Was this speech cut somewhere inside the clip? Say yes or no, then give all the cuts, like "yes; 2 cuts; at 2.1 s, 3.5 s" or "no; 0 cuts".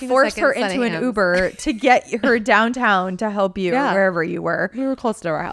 no; 0 cuts